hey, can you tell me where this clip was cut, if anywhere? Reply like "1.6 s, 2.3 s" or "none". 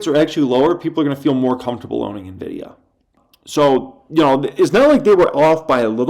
3.2 s

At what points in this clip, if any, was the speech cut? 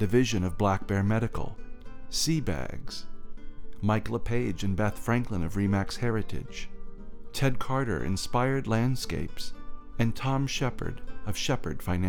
1.6 s

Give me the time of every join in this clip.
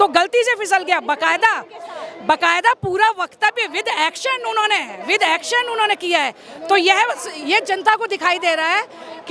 none

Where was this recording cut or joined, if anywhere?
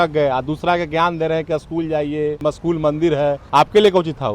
2.4 s, 3.4 s

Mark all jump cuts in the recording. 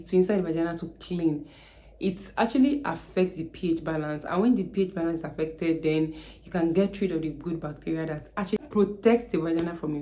none

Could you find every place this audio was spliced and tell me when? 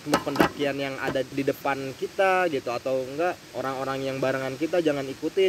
1.3 s, 3.5 s

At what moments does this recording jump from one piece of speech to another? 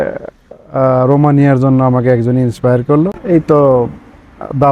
3.2 s

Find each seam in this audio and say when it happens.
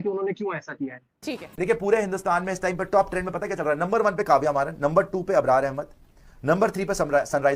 1.3 s

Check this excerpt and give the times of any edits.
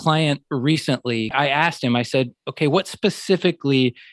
1.3 s

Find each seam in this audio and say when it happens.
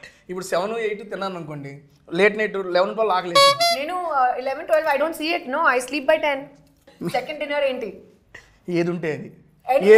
6.9 s

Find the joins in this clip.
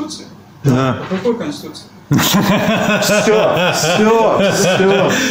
none

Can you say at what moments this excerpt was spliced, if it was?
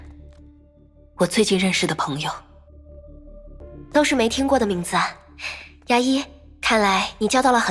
3.6 s

